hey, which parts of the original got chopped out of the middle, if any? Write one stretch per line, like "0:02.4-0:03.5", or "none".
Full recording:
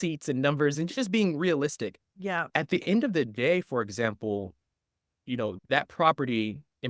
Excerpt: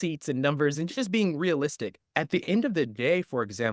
0:02.1-0:02.4